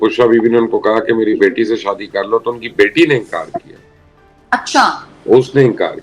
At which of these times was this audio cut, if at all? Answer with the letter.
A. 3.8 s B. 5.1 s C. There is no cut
C